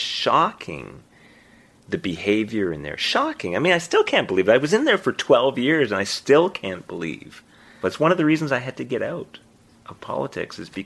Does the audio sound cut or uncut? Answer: cut